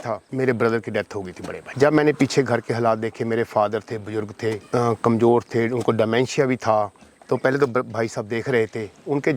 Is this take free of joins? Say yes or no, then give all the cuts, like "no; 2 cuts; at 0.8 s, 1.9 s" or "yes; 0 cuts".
no; 1 cut; at 1.6 s